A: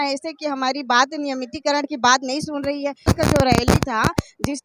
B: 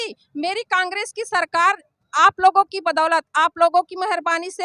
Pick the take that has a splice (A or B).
A